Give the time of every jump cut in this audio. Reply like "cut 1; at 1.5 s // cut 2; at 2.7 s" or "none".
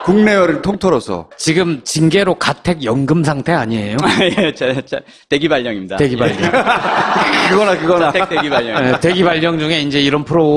none